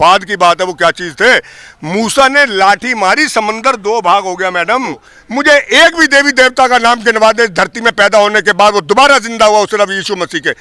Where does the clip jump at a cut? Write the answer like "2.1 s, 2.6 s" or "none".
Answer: 5.1 s